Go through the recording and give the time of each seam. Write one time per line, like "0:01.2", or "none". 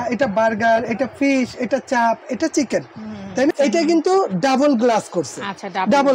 0:03.5